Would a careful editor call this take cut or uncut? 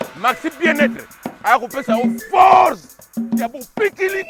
uncut